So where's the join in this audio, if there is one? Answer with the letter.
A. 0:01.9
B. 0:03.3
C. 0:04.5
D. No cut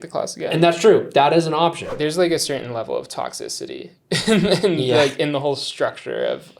A